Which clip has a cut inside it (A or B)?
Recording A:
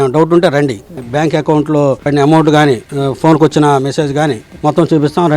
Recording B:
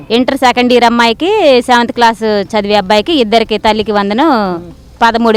A